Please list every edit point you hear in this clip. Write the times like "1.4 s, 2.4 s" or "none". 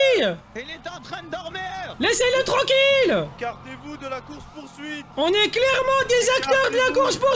1.9 s, 3.3 s, 5.1 s